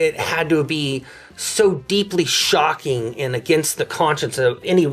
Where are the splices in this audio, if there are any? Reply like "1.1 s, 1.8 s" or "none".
none